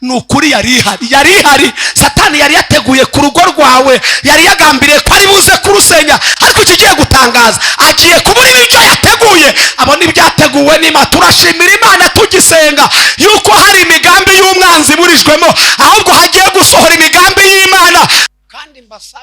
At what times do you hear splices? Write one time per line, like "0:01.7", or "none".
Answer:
0:18.2